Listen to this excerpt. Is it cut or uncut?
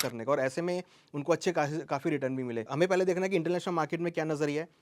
cut